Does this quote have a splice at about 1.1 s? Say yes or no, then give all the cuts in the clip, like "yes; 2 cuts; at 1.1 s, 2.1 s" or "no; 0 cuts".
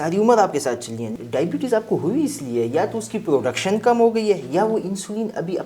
yes; 1 cut; at 1.1 s